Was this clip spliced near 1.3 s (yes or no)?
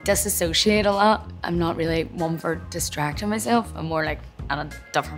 yes